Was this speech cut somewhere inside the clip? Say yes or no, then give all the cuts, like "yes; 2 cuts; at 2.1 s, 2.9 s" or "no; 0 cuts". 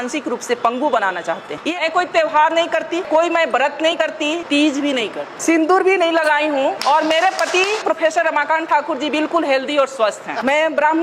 yes; 1 cut; at 1.6 s